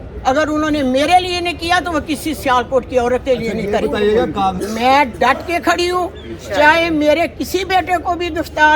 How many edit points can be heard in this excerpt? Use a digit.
1